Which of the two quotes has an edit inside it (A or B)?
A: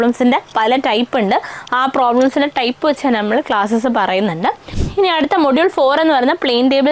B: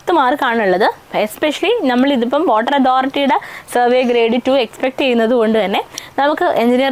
A